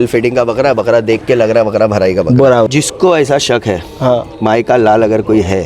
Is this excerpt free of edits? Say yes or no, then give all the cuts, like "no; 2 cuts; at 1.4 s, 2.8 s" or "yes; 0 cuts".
no; 1 cut; at 2.7 s